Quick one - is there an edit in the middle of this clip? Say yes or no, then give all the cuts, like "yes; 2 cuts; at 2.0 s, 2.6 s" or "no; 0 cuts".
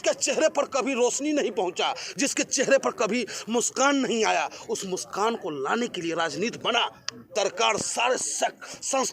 yes; 1 cut; at 7.3 s